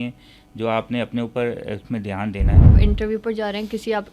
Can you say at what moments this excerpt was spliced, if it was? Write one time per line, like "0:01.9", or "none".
0:02.7